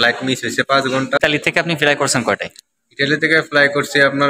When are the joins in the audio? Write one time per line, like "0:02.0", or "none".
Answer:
0:01.2